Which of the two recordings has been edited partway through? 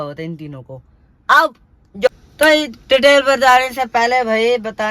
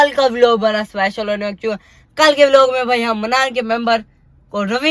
first; 1 cut; at 2.1 s

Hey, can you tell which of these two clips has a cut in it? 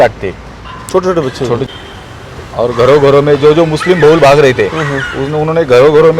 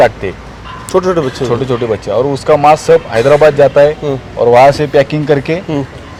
first; 1 cut; at 1.6 s

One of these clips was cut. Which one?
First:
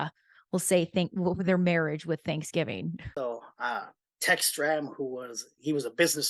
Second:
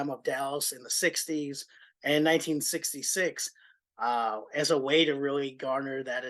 first; 1 cut; at 3.1 s

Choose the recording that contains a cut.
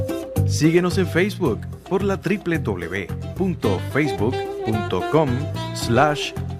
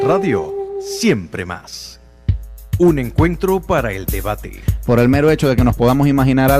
second; 1 cut; at 2.7 s

